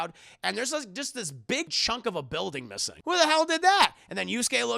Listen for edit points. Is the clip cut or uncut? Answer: cut